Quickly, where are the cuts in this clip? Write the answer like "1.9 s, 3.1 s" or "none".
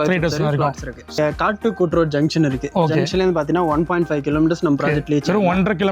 1.2 s